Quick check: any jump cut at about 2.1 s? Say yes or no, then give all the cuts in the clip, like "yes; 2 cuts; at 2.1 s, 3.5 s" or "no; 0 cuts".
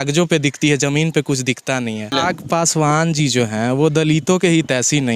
yes; 1 cut; at 2.1 s